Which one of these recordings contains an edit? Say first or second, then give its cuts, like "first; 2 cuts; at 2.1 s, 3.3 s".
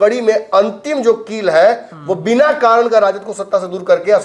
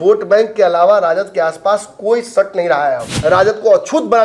second; 1 cut; at 3.1 s